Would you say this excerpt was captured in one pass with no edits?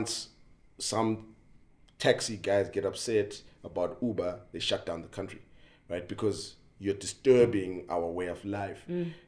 yes; 0 cuts

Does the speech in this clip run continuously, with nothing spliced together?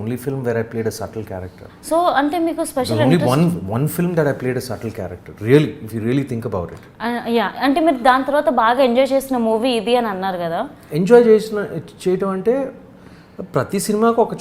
yes; 0 cuts

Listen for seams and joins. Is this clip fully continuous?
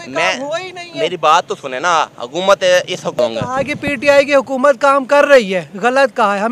no; 1 cut; at 3.2 s

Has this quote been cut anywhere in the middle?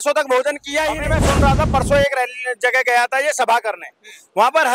yes; 1 cut; at 1.1 s

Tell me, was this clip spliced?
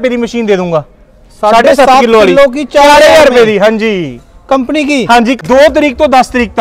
yes; 1 cut; at 5.4 s

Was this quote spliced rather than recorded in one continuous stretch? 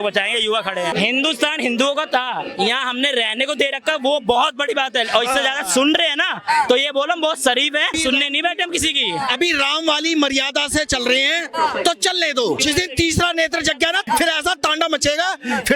yes; 4 cuts; at 0.9 s, 7.9 s, 12.6 s, 14.1 s

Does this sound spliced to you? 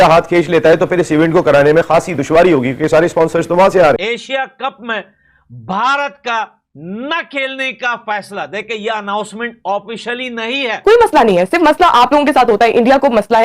yes; 2 cuts; at 4.0 s, 10.8 s

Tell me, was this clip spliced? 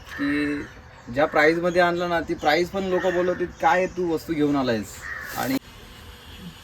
yes; 1 cut; at 5.6 s

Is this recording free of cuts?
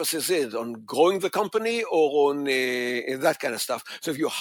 yes; 0 cuts

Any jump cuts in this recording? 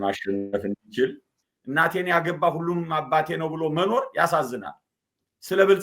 yes; 1 cut; at 1.2 s

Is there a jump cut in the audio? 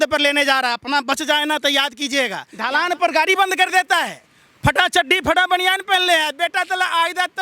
yes; 1 cut; at 2.5 s

